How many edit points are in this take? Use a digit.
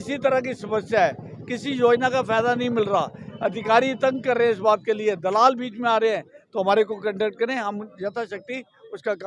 0